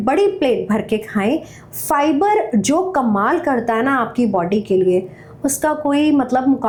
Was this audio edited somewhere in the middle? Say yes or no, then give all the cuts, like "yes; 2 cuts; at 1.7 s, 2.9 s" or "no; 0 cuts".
no; 0 cuts